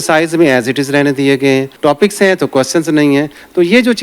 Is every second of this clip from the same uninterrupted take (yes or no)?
no